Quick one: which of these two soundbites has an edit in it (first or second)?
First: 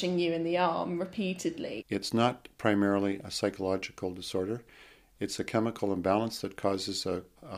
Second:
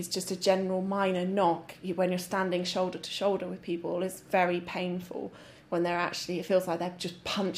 first